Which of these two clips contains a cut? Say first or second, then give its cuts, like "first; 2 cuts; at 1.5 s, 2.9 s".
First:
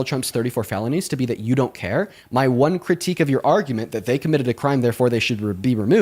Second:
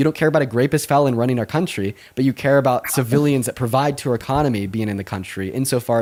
first; 1 cut; at 2.2 s